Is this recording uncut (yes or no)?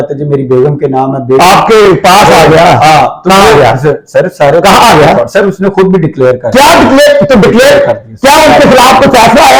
yes